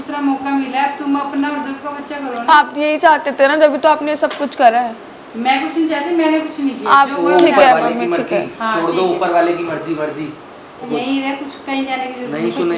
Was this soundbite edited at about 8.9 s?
no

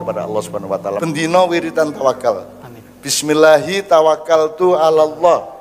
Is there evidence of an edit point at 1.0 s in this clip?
yes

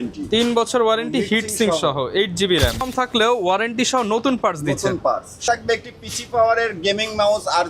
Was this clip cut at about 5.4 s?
yes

